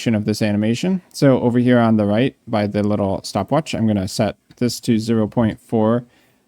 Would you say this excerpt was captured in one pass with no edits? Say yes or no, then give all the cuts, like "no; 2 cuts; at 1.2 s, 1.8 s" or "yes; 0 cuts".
no; 2 cuts; at 1.1 s, 3.7 s